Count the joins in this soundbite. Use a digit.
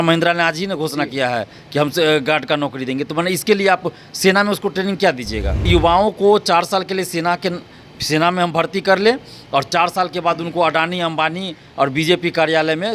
1